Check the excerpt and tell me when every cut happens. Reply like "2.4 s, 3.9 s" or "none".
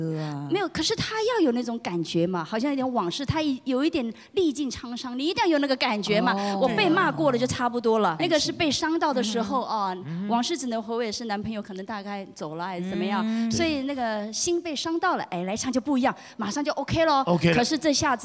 none

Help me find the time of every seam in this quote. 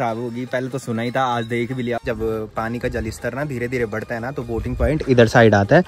2.0 s

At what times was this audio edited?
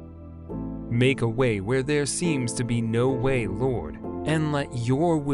0.9 s

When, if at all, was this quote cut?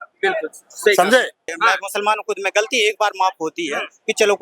1.4 s

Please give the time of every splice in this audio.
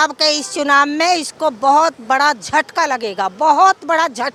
none

